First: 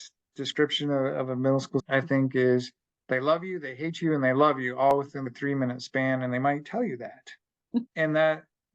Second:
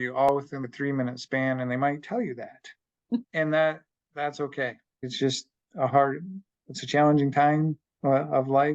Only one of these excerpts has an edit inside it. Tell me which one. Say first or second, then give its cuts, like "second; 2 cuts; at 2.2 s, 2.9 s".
first; 1 cut; at 1.8 s